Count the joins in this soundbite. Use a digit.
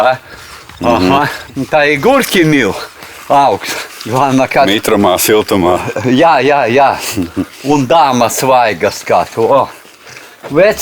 0